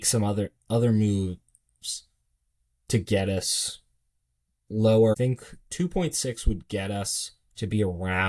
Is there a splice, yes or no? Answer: yes